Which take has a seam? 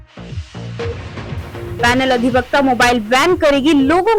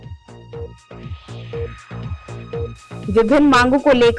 second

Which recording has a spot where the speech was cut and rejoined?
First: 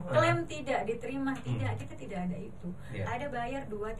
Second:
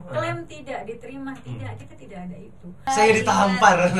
second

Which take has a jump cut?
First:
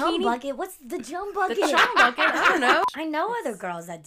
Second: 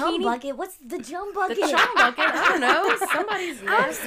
first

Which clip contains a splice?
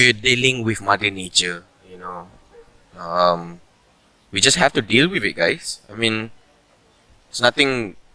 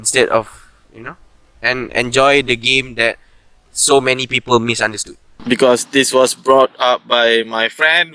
second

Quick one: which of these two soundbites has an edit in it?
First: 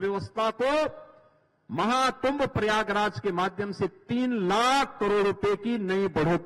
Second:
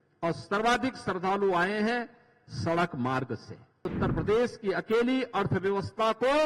second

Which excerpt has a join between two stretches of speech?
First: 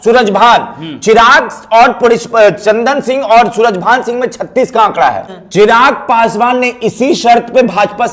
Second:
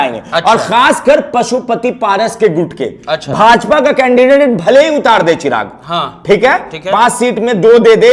first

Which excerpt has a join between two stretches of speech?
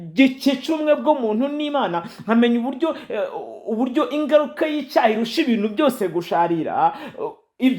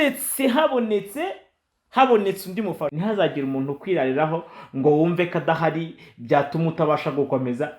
second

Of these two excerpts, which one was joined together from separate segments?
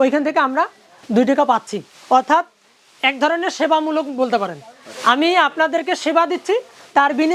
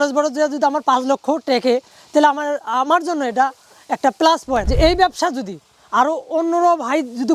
second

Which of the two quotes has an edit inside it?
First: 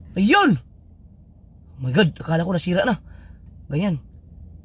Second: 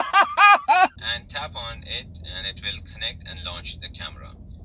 second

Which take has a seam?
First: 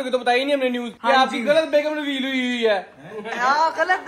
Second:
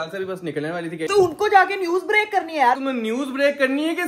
second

